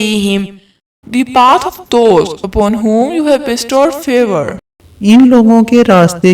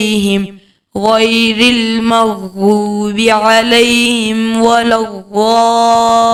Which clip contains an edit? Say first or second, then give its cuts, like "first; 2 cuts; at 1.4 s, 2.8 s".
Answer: first; 2 cuts; at 1.0 s, 4.6 s